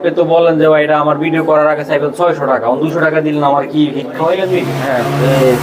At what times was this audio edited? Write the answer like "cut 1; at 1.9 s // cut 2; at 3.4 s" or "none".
cut 1; at 4.7 s